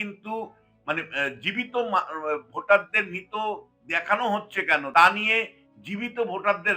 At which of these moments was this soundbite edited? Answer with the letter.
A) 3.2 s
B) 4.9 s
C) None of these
B